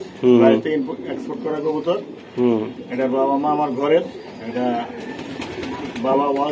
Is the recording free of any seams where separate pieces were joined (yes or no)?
yes